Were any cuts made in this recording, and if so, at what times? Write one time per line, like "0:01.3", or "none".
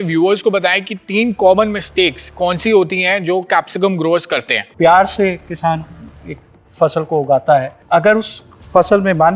0:04.6
0:07.8